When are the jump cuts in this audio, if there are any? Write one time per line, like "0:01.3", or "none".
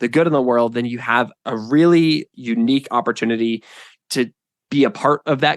0:01.3
0:02.3

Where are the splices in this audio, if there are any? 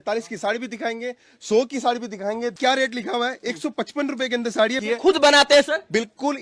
0:02.6
0:04.8

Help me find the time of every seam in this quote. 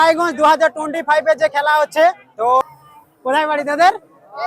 0:02.6

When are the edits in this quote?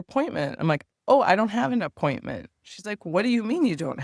none

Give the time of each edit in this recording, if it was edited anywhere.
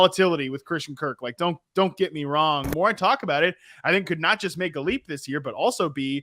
0:02.7

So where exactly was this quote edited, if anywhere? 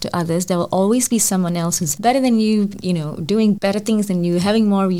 0:01.8
0:02.8
0:03.6

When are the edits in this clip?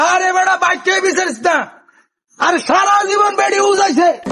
none

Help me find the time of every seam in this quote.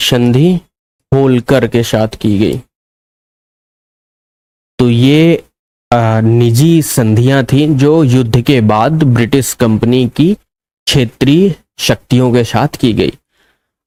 none

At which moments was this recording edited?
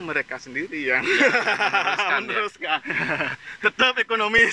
0:02.9

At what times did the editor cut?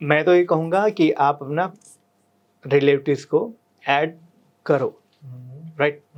none

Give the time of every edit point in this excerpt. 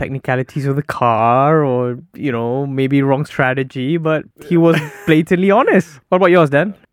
0:06.0

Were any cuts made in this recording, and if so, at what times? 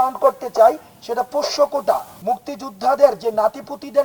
0:02.1

